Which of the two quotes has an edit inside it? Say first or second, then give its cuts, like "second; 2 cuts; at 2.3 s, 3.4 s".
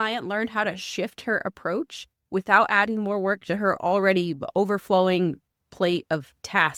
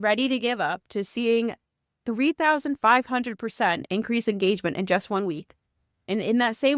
second; 1 cut; at 1.0 s